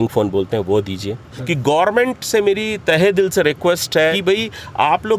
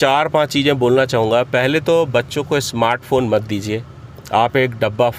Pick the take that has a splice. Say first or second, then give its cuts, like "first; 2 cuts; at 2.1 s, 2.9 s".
first; 2 cuts; at 1.3 s, 4.2 s